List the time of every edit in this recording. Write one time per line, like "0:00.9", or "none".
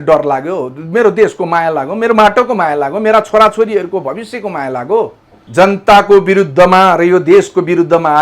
0:05.4